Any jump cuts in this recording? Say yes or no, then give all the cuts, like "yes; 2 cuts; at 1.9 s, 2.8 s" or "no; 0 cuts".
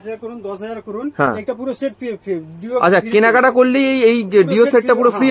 no; 0 cuts